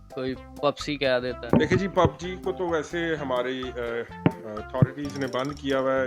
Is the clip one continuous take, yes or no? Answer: no